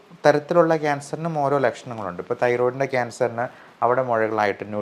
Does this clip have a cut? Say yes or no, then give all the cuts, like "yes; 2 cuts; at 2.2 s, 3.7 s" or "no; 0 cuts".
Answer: no; 0 cuts